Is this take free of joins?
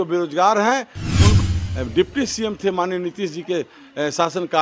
no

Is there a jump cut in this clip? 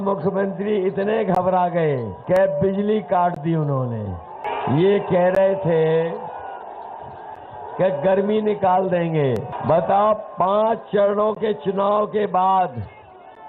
yes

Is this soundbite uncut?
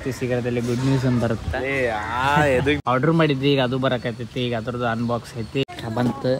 no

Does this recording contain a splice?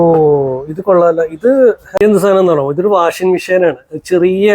yes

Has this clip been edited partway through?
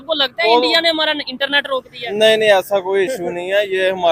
no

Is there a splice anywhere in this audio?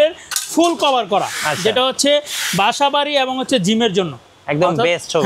no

